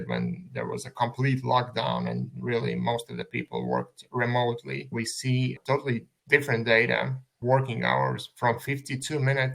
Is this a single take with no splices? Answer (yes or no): no